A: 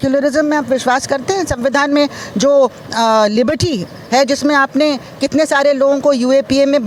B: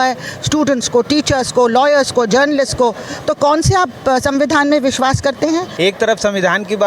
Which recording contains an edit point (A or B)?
B